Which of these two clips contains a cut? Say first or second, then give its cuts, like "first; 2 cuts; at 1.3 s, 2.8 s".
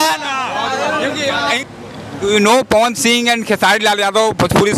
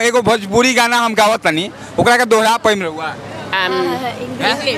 first; 1 cut; at 1.6 s